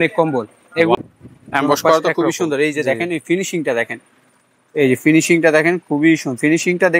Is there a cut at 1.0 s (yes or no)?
yes